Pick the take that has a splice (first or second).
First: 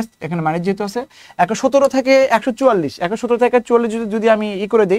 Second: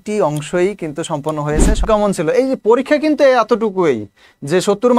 second